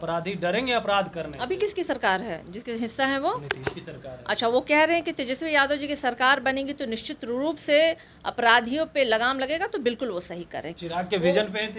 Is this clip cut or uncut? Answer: cut